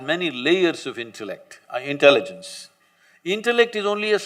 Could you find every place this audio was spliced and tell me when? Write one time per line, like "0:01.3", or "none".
none